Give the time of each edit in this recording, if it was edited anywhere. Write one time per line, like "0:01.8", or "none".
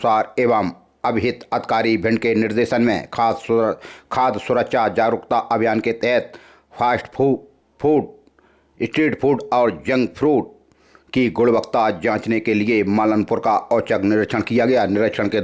none